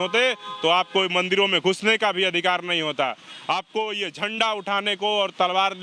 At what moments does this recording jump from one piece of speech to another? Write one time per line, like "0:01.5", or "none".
none